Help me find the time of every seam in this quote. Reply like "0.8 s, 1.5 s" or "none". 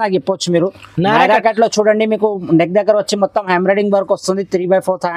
none